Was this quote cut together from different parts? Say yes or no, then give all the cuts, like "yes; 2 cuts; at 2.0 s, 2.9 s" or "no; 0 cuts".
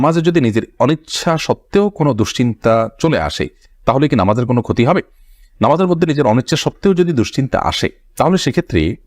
no; 0 cuts